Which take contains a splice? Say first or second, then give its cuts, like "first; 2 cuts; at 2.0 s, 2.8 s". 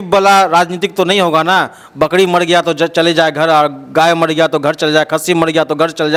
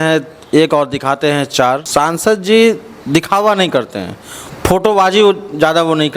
second; 1 cut; at 1.8 s